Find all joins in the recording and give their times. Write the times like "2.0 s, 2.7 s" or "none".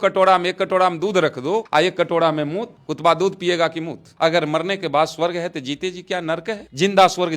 1.7 s, 4.1 s